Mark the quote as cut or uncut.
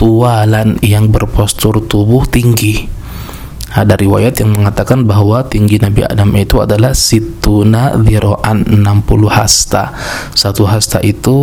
uncut